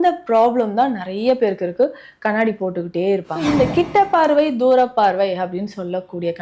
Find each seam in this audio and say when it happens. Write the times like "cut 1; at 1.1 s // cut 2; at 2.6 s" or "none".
cut 1; at 3.3 s